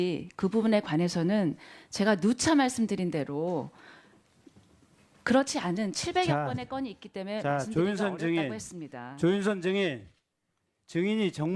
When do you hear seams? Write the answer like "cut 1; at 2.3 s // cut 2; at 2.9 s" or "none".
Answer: cut 1; at 7.2 s

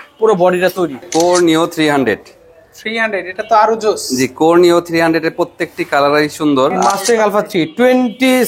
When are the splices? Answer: cut 1; at 1.0 s // cut 2; at 6.8 s

